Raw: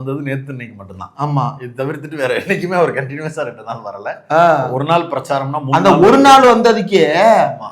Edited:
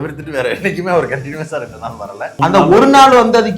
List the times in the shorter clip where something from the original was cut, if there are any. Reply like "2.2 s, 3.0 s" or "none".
2.3 s

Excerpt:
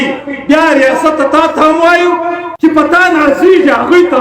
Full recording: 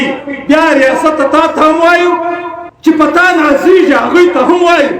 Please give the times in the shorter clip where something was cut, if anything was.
2.4 s

